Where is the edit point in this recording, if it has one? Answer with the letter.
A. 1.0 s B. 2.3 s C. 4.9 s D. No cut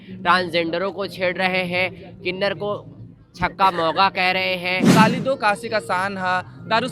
C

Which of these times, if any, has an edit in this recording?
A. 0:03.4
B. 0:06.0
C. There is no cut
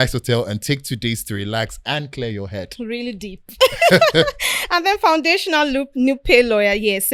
C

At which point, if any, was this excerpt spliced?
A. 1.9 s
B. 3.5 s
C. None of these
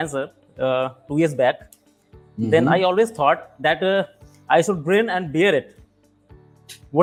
C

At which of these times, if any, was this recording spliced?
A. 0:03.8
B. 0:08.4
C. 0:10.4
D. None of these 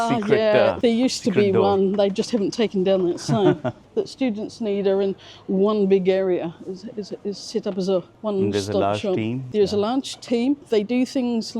A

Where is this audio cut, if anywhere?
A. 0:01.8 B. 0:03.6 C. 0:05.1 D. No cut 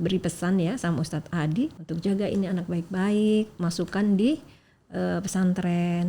A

